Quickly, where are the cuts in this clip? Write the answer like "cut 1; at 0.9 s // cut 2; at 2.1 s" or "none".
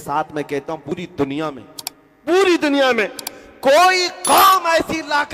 cut 1; at 0.9 s